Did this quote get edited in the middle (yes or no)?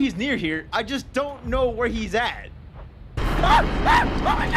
no